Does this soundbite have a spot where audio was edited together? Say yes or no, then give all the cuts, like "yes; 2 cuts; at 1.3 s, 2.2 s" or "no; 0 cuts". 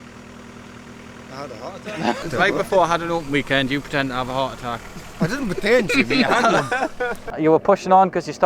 yes; 2 cuts; at 2.2 s, 7.2 s